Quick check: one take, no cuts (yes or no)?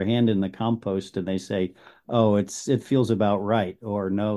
yes